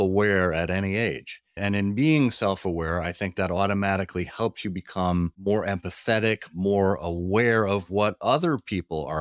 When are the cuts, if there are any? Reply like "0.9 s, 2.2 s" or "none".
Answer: none